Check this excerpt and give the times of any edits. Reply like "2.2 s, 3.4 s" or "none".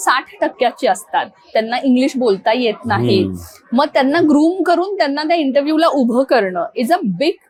none